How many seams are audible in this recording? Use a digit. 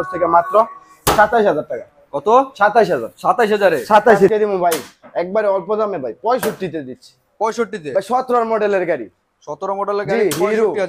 1